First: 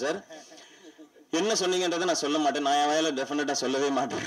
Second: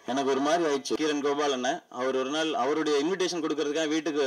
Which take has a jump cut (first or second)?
second